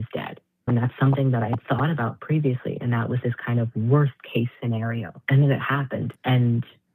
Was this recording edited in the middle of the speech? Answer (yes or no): yes